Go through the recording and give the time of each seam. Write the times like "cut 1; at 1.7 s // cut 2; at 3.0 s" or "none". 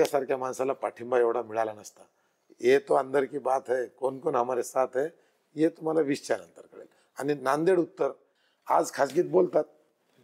cut 1; at 8.3 s